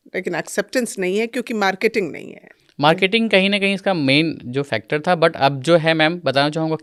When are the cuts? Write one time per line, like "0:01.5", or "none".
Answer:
none